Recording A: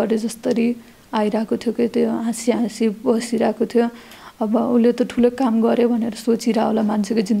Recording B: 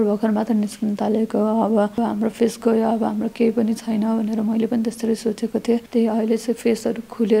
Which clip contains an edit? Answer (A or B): B